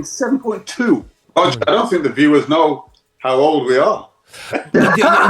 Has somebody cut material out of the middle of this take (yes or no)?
yes